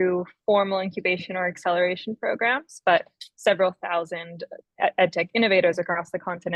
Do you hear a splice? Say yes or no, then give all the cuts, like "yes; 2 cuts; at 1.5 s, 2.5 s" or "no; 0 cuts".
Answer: no; 0 cuts